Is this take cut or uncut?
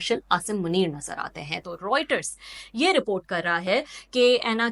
cut